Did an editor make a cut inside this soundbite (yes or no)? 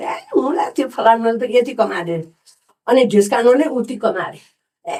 no